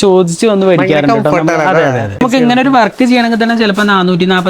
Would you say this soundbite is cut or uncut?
cut